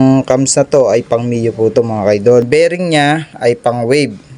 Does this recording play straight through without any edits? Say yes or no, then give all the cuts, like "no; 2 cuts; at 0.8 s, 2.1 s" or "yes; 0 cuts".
no; 1 cut; at 2.5 s